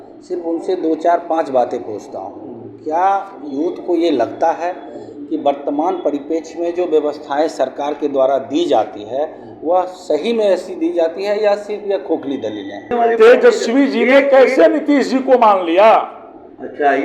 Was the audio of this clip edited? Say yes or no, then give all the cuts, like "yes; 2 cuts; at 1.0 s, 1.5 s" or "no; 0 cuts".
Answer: yes; 1 cut; at 12.9 s